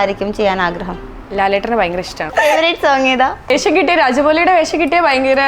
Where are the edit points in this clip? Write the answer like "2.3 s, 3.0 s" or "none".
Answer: 2.3 s, 3.5 s